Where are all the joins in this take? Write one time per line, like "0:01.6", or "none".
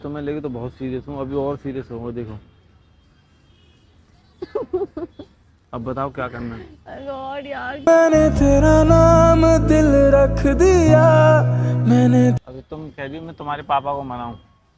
0:12.5

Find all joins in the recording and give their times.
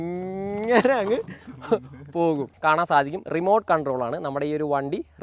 0:02.5

